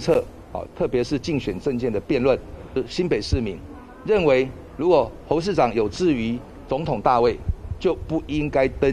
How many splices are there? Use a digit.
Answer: 1